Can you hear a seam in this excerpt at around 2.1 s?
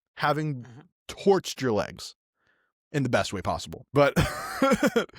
no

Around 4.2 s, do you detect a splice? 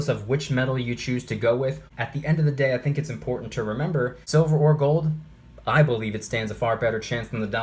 yes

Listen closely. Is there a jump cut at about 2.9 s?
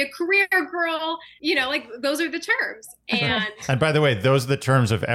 no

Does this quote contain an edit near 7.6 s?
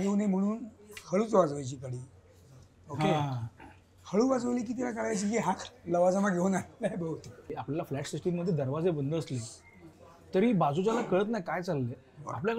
yes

